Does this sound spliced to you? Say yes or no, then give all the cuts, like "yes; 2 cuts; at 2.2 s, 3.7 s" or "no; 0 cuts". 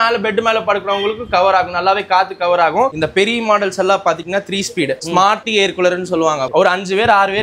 yes; 2 cuts; at 3.0 s, 6.4 s